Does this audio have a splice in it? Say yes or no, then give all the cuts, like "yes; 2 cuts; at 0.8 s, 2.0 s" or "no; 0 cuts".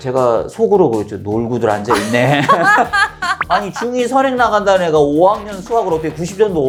no; 0 cuts